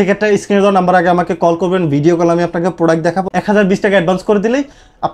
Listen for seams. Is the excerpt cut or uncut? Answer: cut